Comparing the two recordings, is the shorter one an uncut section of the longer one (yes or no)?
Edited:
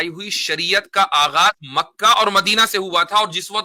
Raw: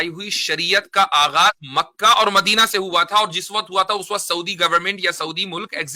yes